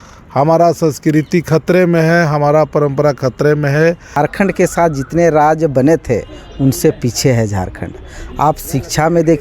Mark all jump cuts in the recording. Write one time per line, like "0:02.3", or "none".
0:04.1